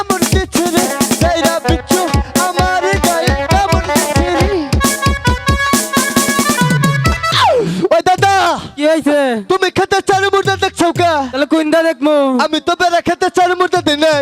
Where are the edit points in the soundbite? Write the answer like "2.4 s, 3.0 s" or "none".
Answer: 7.2 s